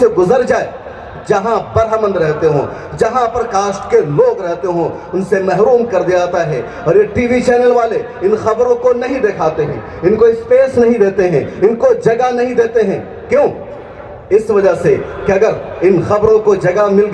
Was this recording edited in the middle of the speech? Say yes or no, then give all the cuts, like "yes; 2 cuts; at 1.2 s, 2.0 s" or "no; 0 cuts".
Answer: no; 0 cuts